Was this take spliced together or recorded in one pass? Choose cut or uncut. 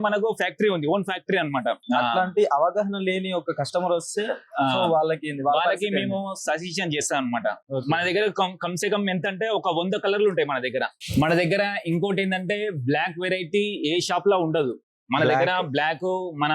cut